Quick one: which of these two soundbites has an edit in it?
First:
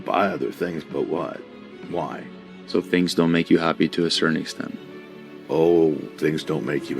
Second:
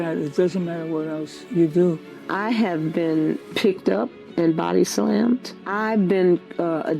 second; 4 cuts; at 1.4 s, 2.1 s, 3.5 s, 5.6 s

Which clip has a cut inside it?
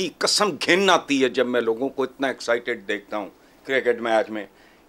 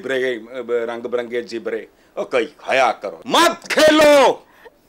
second; 1 cut; at 3.1 s

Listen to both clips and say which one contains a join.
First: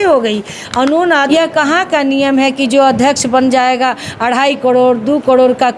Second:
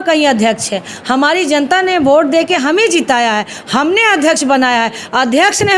first; 1 cut; at 1.3 s

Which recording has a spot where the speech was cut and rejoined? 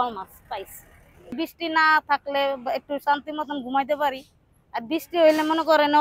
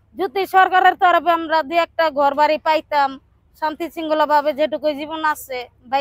first; 1 cut; at 1.3 s

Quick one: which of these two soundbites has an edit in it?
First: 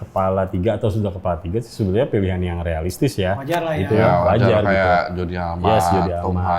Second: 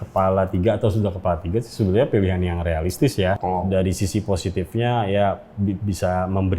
second; 1 cut; at 3.4 s

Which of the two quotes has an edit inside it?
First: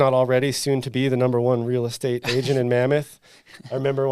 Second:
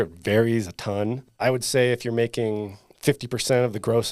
second; 1 cut; at 1.3 s

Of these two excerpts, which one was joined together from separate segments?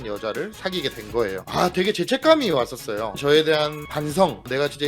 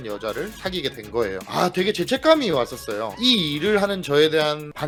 first; 1 cut; at 3.1 s

